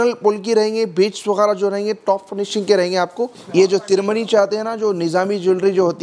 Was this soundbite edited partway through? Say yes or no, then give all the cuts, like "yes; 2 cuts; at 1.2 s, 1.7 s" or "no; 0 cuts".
yes; 1 cut; at 3.3 s